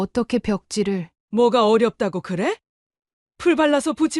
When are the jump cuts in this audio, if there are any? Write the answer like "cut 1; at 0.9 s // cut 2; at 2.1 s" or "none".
cut 1; at 1.1 s